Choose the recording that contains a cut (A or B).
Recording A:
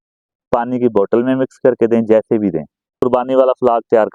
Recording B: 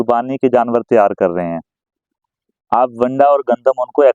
A